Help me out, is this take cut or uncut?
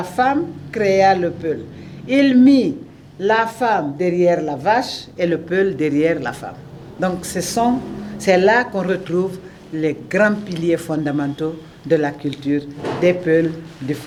uncut